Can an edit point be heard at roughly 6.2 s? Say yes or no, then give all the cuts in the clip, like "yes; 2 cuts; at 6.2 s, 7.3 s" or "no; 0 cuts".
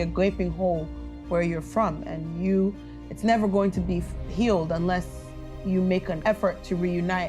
yes; 1 cut; at 6.2 s